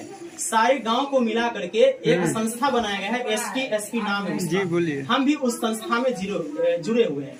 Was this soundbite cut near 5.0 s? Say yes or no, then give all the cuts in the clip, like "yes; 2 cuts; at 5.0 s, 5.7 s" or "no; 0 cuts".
no; 0 cuts